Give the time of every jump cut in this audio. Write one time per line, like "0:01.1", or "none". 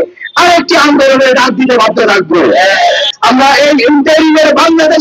0:03.1